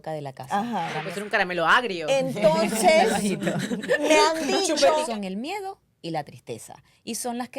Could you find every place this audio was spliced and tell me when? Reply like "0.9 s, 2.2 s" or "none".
1.1 s, 5.1 s